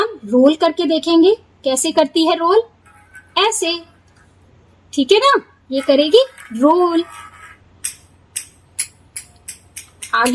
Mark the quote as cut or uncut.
uncut